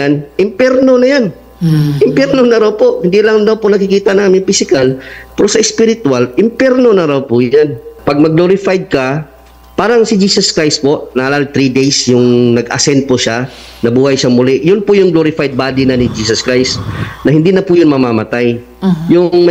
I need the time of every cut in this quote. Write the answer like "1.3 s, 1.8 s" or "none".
7.9 s